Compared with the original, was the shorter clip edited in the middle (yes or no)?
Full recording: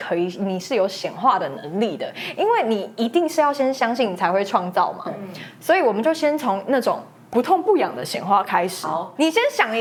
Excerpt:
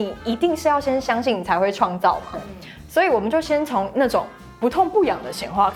no